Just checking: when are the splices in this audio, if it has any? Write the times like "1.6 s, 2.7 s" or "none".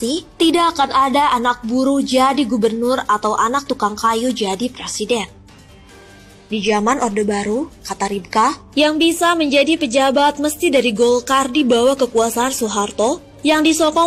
none